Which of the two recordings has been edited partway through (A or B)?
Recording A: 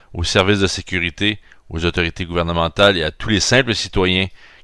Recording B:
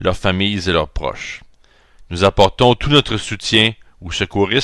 B